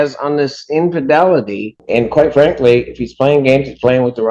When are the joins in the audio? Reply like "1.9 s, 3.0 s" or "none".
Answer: 1.7 s